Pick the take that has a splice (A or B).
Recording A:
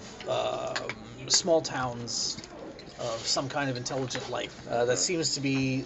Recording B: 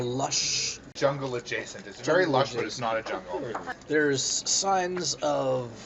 B